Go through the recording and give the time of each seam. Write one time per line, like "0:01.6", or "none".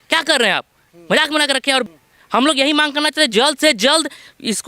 0:01.9

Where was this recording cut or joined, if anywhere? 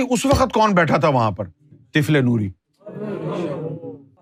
none

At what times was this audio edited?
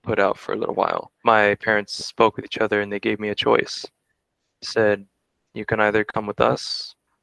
0:01.1

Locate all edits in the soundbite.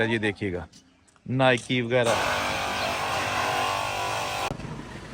0:02.1

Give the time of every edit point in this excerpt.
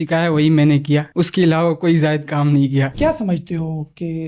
0:02.9

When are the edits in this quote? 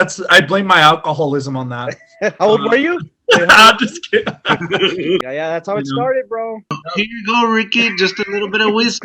0:05.2
0:06.8

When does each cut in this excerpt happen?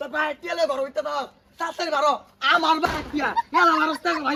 none

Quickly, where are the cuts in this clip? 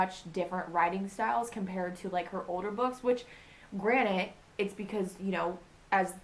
none

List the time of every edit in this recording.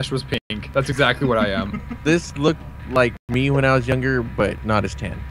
0:02.4

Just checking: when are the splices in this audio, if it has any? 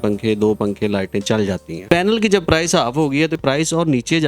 0:01.8
0:03.4

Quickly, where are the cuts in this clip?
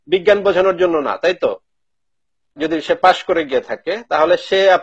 0:02.6

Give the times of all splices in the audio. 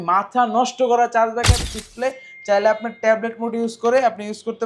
0:01.6

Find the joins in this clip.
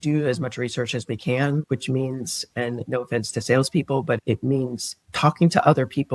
0:04.2

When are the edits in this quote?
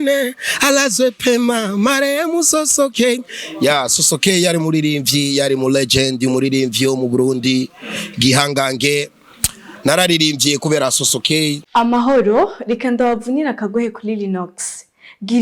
0:11.6

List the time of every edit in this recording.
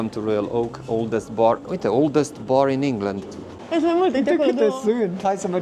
0:03.6

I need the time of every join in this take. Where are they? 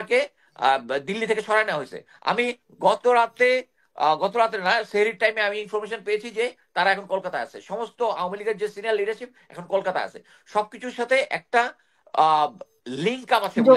none

